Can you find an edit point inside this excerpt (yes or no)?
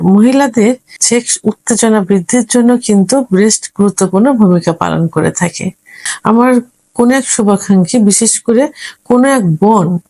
yes